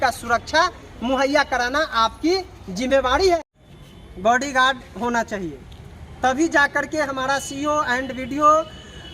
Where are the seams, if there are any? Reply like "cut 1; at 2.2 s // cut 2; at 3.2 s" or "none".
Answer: cut 1; at 3.4 s